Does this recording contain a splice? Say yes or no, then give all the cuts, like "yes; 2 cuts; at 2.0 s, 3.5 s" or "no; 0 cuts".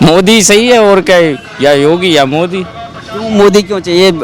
no; 0 cuts